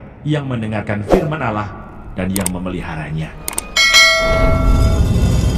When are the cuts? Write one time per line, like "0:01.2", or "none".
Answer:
none